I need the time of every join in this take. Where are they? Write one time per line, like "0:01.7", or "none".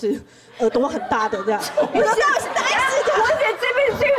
none